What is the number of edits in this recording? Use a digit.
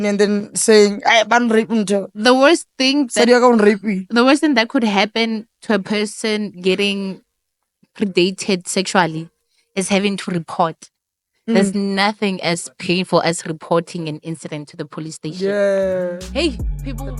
0